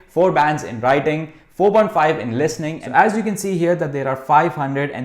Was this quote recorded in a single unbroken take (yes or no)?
no